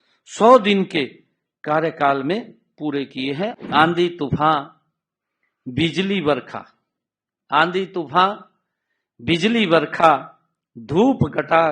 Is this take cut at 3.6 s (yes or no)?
yes